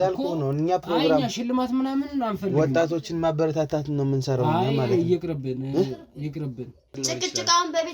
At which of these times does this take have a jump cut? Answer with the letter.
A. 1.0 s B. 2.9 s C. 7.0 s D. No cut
C